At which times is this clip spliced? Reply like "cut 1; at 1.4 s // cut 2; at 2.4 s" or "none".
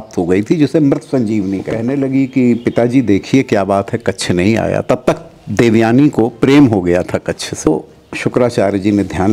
cut 1; at 1.7 s // cut 2; at 7.7 s